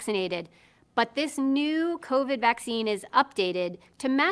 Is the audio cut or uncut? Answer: uncut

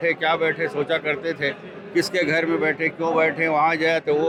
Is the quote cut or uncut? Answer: uncut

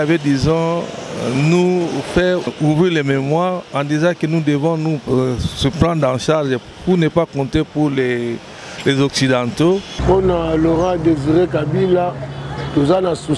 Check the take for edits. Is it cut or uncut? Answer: cut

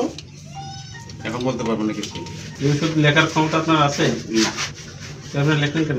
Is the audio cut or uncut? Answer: cut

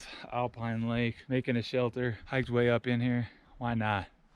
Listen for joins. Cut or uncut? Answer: cut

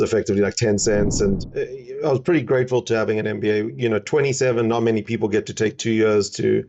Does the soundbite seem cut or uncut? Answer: cut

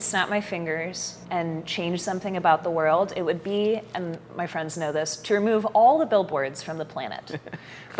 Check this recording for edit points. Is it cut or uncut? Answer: cut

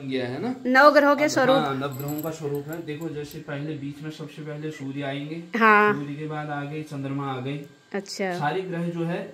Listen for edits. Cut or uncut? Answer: uncut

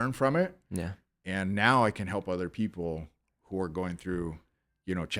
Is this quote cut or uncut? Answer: uncut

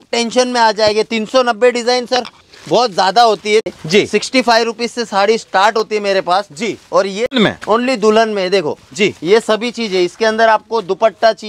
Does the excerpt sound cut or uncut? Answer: cut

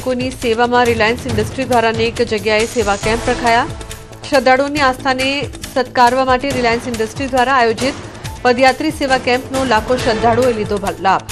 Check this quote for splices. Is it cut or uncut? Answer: uncut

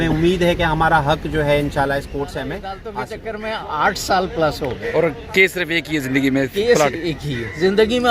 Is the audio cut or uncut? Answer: cut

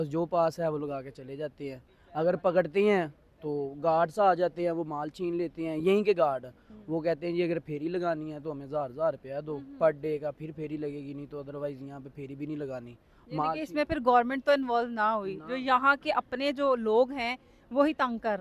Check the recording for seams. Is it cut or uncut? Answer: uncut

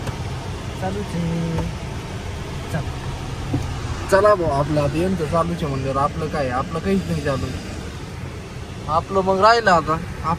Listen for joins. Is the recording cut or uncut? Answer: uncut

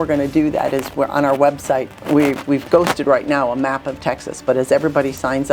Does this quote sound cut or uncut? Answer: cut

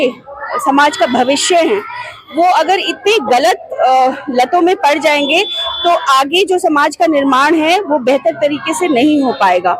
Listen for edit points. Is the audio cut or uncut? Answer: uncut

